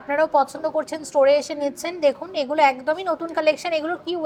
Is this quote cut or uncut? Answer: uncut